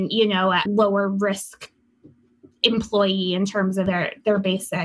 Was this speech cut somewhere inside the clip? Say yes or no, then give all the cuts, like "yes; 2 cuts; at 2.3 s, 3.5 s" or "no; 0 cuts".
yes; 1 cut; at 3.9 s